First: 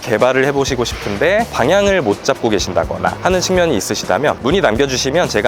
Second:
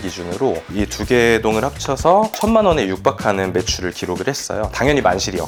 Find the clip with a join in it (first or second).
first